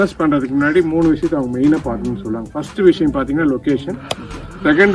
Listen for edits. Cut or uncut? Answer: uncut